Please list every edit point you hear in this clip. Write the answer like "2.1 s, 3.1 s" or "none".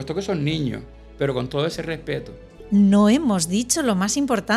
2.5 s